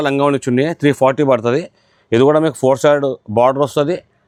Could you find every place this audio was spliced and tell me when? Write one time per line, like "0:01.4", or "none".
none